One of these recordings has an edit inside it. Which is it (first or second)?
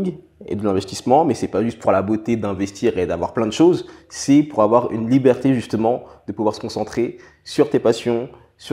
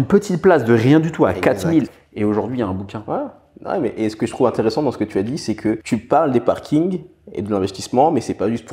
second